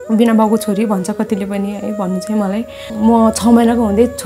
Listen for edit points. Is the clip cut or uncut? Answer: cut